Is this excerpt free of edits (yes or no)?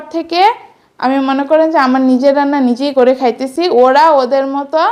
yes